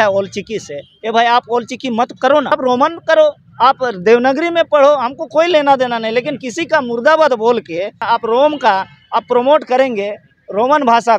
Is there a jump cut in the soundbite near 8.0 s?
yes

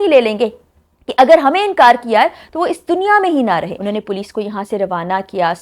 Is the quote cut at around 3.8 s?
yes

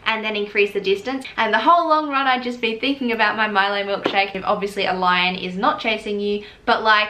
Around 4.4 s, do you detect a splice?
yes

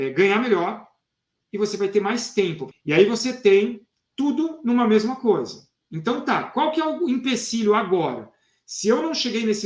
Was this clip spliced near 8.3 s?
no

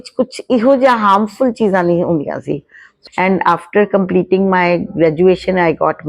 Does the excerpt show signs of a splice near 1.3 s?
no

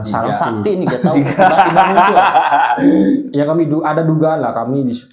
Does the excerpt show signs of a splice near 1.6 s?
no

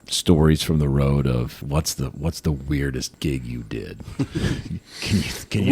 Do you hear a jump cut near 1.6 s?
yes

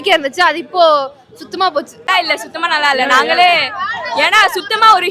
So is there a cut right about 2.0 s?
yes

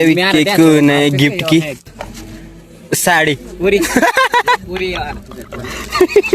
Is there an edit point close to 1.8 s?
yes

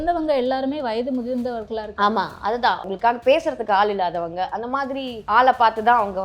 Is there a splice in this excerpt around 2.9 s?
yes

